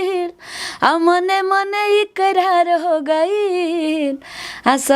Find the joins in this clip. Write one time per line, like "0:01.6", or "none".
none